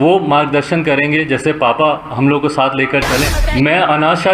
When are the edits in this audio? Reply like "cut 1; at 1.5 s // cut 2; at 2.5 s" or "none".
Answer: cut 1; at 3.4 s